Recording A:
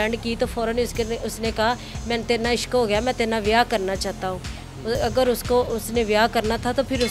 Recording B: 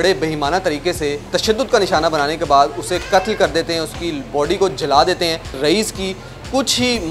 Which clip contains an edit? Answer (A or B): B